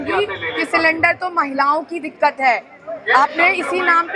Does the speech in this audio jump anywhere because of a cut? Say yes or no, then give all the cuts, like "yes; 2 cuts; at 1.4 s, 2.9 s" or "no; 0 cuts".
no; 0 cuts